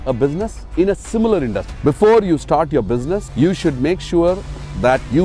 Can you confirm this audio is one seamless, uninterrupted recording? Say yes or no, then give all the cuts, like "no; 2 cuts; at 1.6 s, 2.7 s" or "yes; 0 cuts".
no; 2 cuts; at 1.7 s, 3.3 s